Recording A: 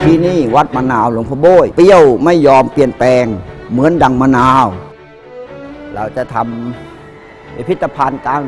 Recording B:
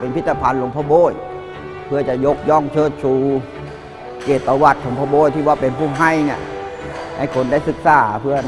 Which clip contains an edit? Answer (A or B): A